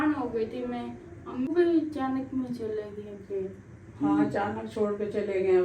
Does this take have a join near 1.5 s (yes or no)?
yes